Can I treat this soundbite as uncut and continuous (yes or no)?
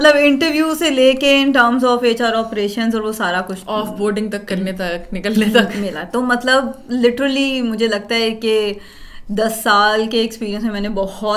yes